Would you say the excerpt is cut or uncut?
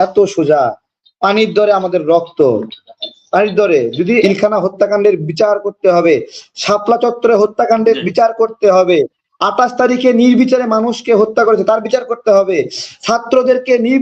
cut